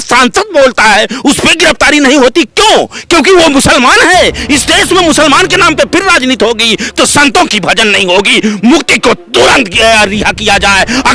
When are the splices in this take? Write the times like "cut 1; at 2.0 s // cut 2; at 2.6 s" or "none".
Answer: none